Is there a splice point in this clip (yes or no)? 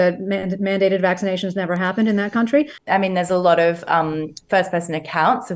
yes